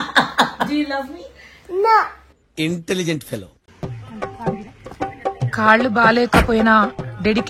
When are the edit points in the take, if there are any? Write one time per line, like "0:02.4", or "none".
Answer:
0:03.6

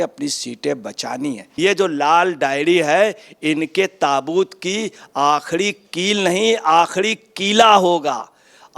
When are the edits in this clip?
0:01.5

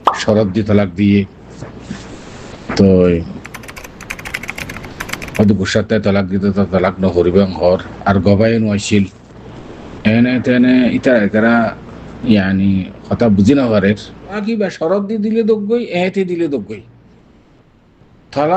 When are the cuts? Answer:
0:14.4

